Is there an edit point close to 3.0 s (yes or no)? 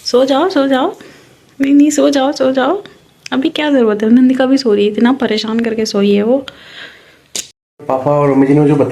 no